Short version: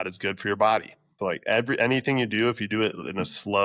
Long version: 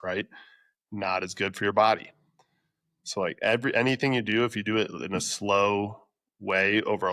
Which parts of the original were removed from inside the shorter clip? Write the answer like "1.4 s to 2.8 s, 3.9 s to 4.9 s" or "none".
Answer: 2.2 s to 3.0 s